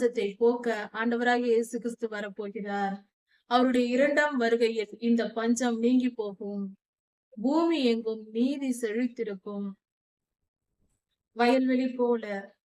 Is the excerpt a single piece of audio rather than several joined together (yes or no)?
yes